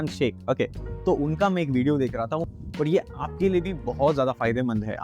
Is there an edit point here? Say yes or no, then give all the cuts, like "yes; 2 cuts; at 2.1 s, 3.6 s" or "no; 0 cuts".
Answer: yes; 1 cut; at 2.5 s